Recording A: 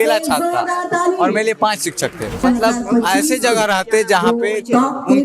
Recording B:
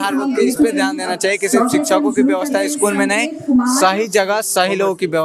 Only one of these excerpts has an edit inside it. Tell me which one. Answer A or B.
A